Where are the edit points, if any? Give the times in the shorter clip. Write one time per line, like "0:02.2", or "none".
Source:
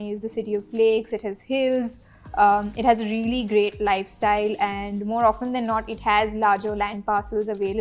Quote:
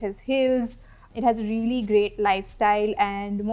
0:01.1